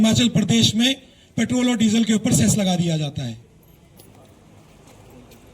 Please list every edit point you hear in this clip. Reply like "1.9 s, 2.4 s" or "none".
4.0 s

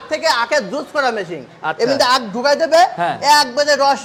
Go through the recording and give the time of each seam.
none

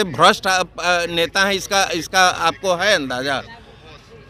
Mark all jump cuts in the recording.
none

